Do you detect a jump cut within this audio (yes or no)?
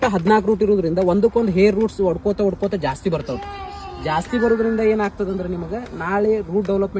no